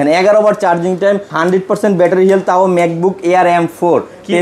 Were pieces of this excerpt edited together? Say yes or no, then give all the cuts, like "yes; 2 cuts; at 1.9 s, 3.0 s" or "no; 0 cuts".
yes; 1 cut; at 1.3 s